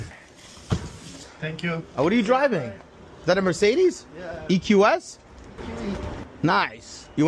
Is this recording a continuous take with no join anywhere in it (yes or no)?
yes